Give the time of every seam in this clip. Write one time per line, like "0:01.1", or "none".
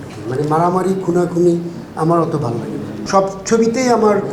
0:02.9